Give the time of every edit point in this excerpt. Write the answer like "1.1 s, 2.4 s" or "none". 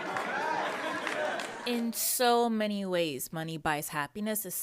1.6 s